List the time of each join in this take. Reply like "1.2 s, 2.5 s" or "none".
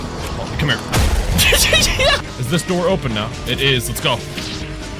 2.2 s